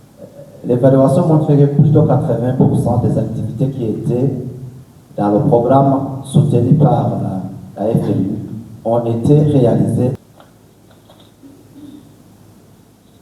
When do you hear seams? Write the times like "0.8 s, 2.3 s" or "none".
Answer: 10.2 s